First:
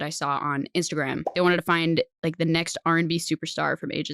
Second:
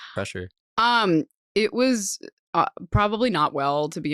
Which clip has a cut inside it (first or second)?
first